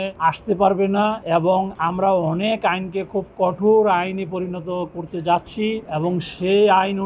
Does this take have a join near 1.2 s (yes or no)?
no